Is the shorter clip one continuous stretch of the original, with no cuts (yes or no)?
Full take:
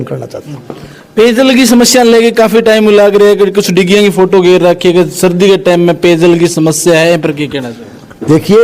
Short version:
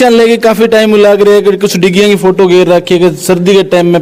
yes